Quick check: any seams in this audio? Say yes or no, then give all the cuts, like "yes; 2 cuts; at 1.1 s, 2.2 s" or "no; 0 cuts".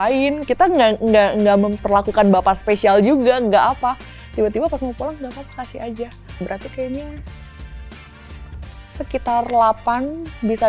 yes; 1 cut; at 6.4 s